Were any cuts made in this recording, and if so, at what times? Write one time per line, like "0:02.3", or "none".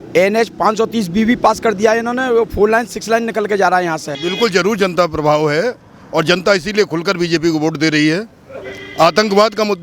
0:04.1